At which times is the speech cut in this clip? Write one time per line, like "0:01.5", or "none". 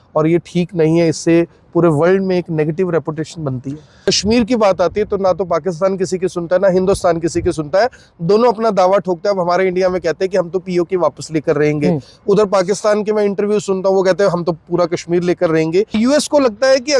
0:03.9
0:16.0